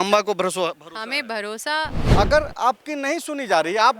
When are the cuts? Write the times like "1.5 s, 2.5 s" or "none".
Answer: 2.0 s